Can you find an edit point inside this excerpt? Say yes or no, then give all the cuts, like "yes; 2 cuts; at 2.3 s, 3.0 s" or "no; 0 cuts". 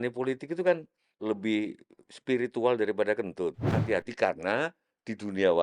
yes; 2 cuts; at 1.0 s, 3.7 s